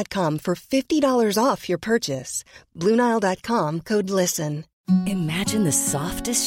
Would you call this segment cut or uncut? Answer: cut